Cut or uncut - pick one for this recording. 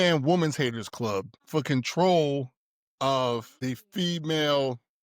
cut